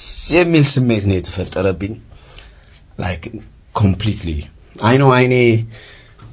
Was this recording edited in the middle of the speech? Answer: no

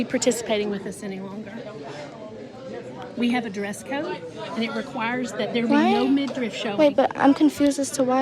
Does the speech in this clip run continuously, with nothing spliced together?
yes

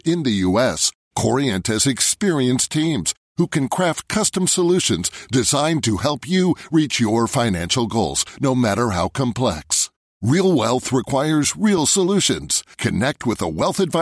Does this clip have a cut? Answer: no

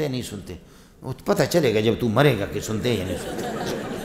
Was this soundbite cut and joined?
no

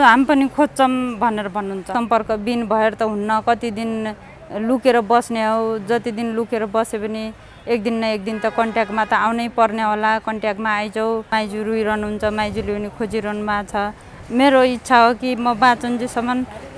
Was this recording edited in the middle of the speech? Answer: yes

